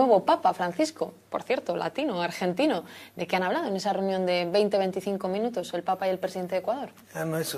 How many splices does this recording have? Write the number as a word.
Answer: one